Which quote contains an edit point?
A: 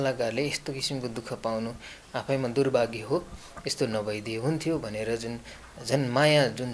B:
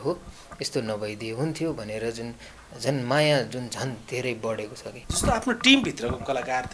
B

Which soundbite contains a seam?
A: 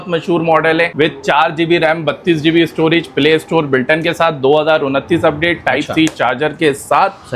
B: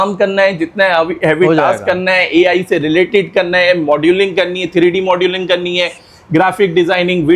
A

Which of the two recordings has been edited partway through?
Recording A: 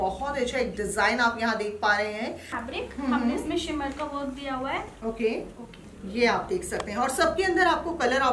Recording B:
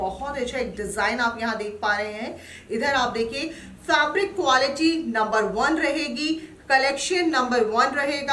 A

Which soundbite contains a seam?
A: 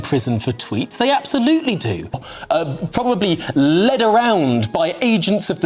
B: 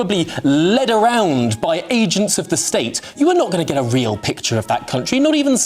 A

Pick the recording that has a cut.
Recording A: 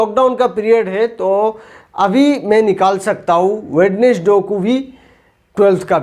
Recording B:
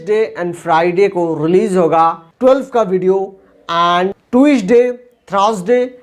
B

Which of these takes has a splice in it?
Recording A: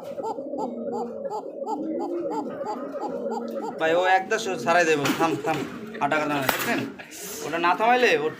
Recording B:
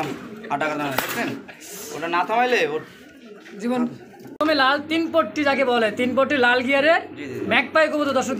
B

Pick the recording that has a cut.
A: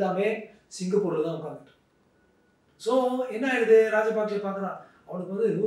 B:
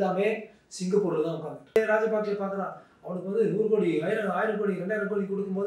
B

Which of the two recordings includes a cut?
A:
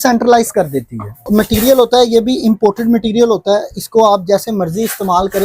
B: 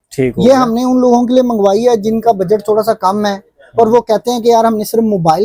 A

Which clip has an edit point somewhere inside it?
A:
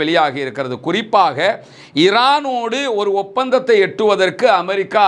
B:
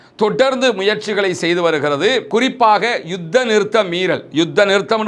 B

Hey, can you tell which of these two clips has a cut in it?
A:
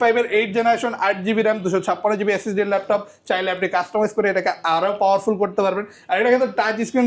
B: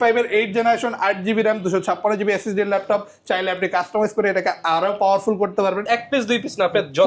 B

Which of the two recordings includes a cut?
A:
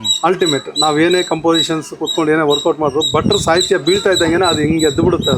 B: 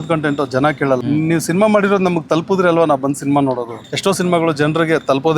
B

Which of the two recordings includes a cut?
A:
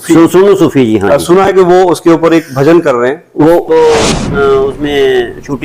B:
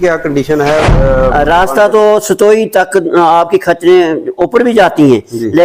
A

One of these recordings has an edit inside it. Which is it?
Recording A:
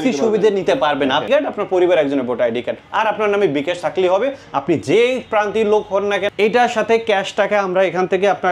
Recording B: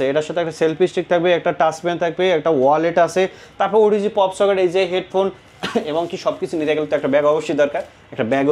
A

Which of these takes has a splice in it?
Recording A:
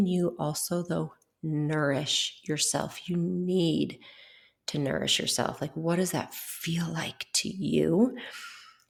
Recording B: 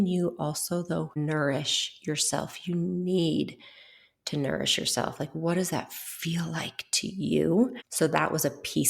B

